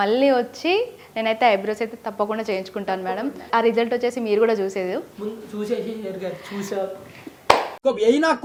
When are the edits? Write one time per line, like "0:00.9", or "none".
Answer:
none

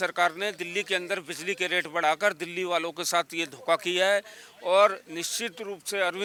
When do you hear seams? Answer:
none

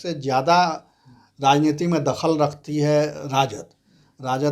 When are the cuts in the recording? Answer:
none

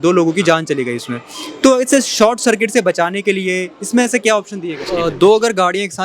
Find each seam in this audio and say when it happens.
0:04.9

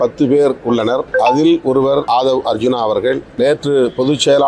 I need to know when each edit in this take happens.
0:01.1
0:02.0
0:03.3

